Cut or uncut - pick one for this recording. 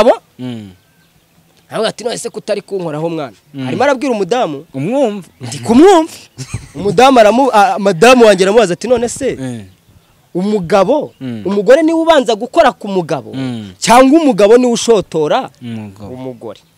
uncut